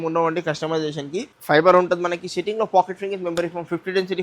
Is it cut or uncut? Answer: cut